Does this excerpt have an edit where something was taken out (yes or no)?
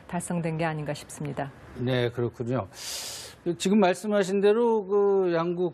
no